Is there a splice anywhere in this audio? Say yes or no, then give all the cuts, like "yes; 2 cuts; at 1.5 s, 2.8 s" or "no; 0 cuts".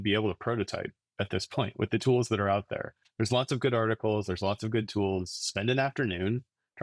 no; 0 cuts